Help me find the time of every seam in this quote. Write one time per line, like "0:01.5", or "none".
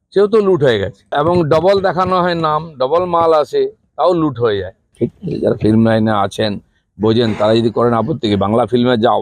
0:01.1
0:04.8